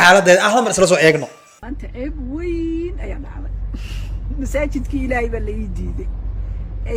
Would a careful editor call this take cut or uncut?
uncut